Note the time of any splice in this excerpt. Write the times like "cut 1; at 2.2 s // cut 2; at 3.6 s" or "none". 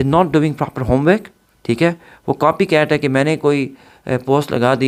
none